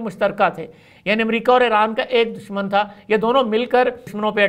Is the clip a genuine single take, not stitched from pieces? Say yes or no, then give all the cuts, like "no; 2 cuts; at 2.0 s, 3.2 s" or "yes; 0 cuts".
yes; 0 cuts